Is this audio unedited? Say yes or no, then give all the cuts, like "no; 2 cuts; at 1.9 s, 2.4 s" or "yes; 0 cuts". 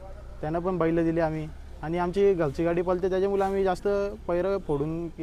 yes; 0 cuts